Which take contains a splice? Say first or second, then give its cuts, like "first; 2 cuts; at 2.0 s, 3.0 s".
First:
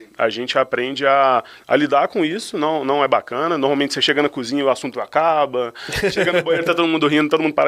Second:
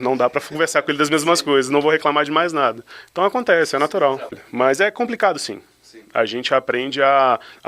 second; 1 cut; at 4.4 s